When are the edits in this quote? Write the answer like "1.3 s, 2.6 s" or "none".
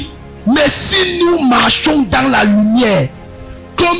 none